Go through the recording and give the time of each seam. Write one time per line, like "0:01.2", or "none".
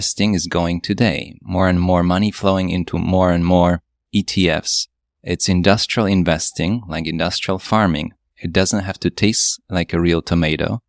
none